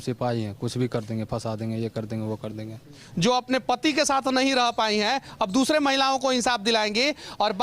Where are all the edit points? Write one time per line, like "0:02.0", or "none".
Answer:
0:03.0